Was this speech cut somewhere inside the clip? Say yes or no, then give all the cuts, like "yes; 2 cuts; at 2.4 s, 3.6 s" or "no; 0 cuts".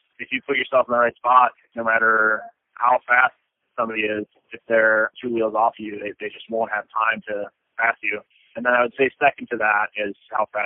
yes; 1 cut; at 8.4 s